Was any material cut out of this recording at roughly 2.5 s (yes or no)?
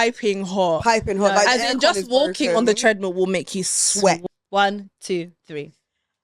no